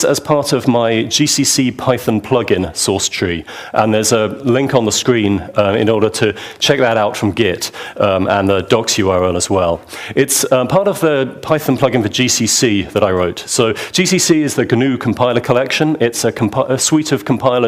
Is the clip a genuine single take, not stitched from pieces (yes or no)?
yes